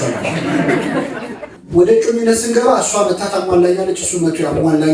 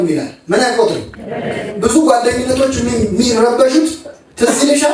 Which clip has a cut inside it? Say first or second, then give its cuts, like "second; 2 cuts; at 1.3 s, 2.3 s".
first; 1 cut; at 1.5 s